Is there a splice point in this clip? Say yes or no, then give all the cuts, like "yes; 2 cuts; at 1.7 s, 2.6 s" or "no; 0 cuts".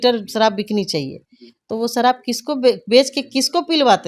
no; 0 cuts